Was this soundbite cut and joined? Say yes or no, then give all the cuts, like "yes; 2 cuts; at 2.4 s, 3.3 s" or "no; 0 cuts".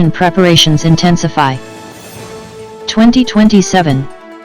yes; 2 cuts; at 1.7 s, 2.9 s